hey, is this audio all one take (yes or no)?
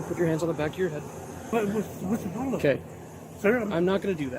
no